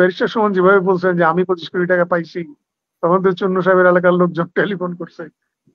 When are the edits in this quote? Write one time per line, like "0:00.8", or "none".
none